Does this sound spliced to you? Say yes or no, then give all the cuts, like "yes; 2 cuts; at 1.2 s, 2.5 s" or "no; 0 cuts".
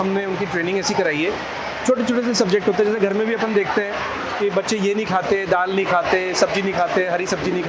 no; 0 cuts